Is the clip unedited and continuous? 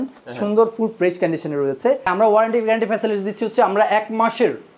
no; 1 cut; at 2.1 s

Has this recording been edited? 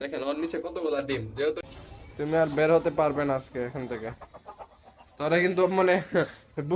yes; 1 cut; at 1.6 s

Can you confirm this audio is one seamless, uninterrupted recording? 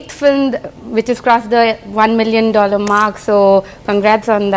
yes; 0 cuts

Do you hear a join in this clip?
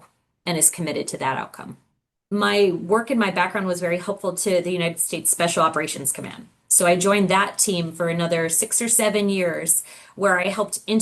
yes; 1 cut; at 2.2 s

